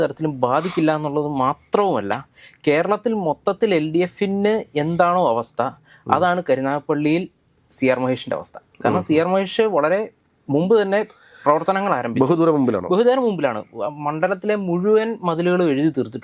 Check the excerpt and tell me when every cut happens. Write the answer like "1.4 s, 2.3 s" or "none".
none